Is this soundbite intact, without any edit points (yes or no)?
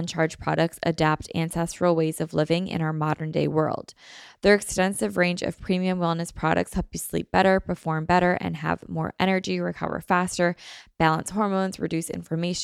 yes